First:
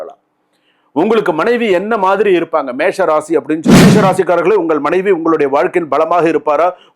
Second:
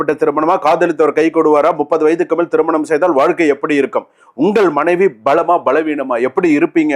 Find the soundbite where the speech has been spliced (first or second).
first